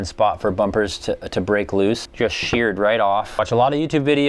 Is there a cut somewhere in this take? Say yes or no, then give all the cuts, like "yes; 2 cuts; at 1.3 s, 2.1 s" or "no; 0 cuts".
yes; 2 cuts; at 2.1 s, 3.4 s